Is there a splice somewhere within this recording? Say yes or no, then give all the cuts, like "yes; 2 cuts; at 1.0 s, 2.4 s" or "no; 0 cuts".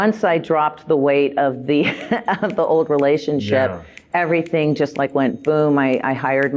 no; 0 cuts